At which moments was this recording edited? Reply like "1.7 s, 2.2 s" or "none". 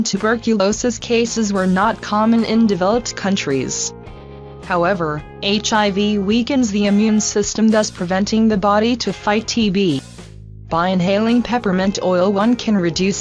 4.6 s

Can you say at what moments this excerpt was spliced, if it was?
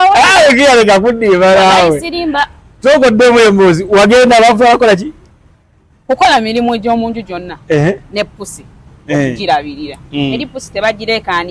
none

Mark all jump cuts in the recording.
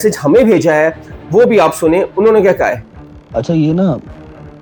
none

